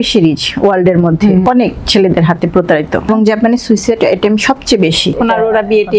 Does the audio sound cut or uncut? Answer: cut